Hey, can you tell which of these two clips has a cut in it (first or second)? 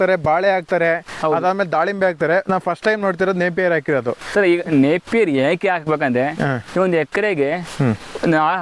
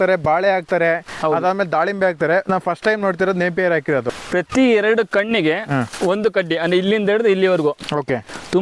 second